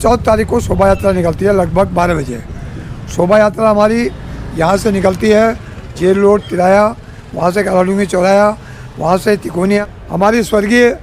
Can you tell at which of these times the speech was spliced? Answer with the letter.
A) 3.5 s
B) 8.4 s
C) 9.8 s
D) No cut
C